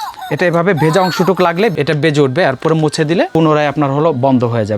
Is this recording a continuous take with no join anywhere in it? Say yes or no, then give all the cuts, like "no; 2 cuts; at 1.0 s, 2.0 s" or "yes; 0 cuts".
no; 2 cuts; at 1.7 s, 3.3 s